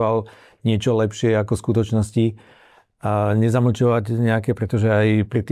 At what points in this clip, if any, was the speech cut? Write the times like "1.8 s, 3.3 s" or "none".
none